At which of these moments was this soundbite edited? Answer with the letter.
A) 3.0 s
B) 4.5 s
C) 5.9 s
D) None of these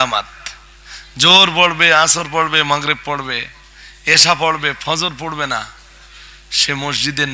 D